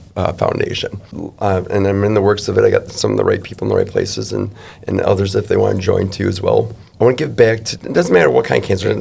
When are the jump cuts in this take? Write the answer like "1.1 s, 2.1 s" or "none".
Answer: 1.2 s, 6.8 s